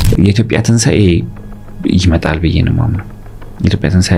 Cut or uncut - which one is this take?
uncut